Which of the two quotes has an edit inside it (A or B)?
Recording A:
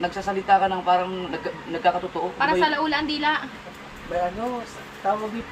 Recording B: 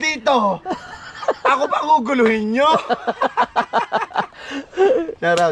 B